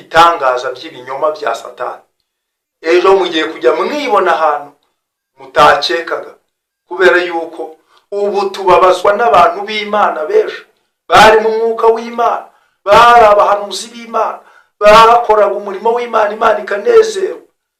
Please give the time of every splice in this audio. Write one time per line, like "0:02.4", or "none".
none